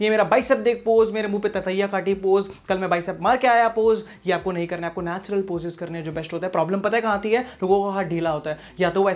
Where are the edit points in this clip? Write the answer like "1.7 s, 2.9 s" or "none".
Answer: none